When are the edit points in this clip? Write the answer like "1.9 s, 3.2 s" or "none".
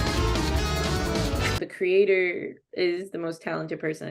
2.6 s